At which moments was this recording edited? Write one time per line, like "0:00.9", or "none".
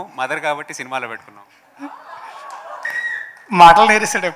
0:02.9